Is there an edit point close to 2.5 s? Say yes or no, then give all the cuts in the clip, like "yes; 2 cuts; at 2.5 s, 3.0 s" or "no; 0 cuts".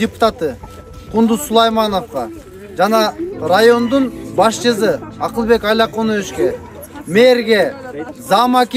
no; 0 cuts